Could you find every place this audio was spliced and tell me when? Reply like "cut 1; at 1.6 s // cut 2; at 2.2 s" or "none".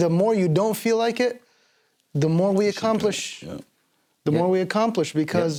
none